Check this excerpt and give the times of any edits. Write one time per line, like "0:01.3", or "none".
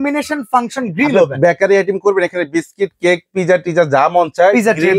none

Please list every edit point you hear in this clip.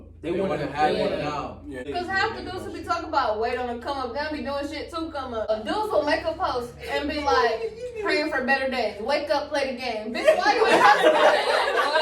0:01.9
0:05.5

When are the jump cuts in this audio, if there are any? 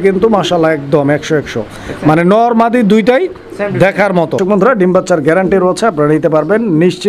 0:04.4

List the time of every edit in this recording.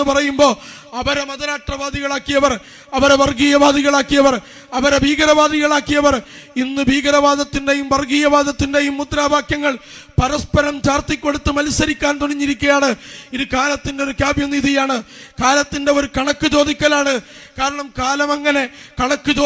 none

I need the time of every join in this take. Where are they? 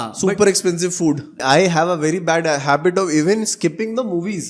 0:01.4

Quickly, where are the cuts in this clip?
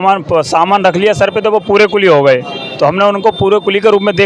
none

